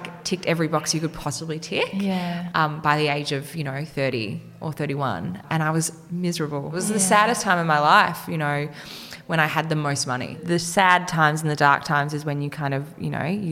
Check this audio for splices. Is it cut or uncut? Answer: cut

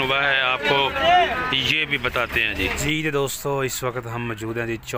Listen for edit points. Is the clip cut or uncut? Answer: cut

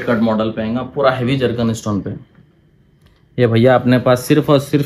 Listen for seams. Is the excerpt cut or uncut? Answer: uncut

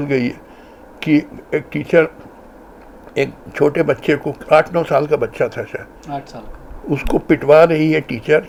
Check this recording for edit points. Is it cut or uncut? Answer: uncut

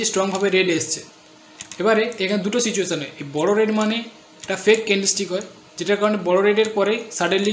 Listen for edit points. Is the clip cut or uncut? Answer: uncut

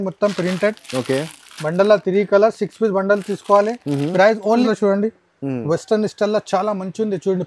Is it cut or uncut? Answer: cut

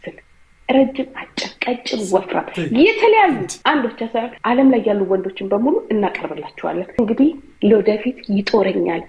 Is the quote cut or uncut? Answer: cut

